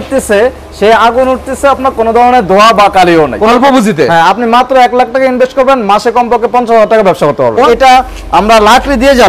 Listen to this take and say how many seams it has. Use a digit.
2